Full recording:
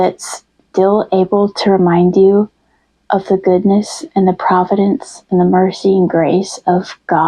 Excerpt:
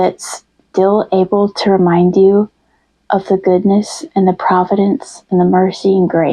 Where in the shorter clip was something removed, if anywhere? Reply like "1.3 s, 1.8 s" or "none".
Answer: none